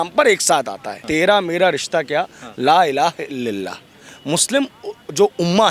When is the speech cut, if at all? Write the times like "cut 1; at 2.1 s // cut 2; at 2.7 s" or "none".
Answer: cut 1; at 1.0 s